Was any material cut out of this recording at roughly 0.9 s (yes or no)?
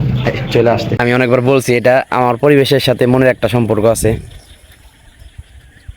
yes